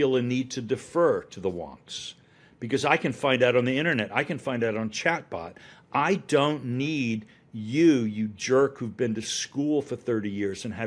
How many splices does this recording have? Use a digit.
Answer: 0